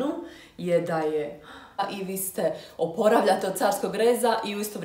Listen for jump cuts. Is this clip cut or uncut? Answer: cut